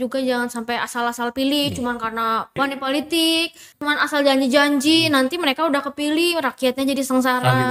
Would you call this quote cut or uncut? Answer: cut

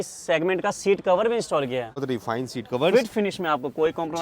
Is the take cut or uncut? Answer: cut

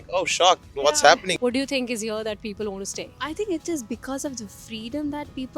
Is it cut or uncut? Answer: cut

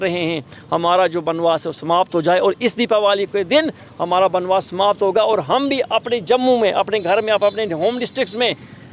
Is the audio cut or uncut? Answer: uncut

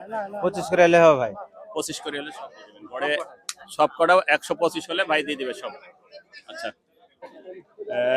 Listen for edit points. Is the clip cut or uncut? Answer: cut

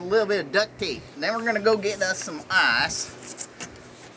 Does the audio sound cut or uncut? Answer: cut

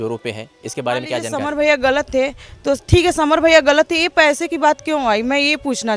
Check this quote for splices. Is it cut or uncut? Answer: cut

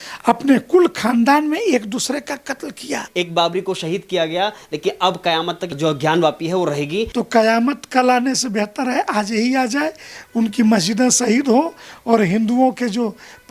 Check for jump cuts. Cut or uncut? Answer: cut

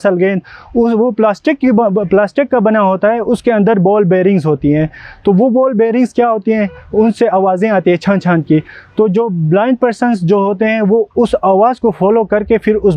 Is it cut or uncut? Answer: uncut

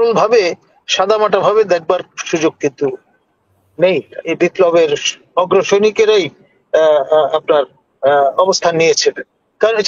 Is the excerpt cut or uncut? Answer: cut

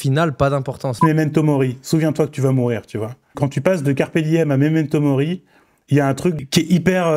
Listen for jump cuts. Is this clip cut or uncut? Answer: cut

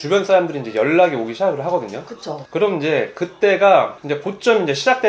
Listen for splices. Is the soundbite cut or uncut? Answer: uncut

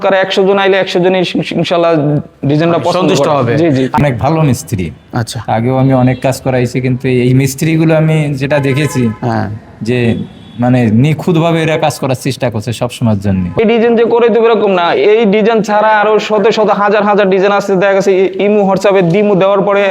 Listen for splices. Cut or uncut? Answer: cut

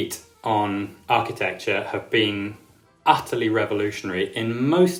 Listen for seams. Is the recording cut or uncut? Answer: uncut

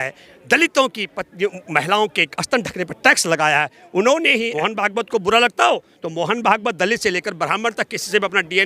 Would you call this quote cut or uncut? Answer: cut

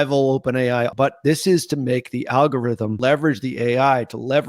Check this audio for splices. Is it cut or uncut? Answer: cut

